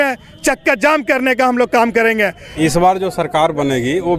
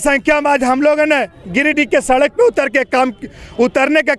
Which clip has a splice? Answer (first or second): first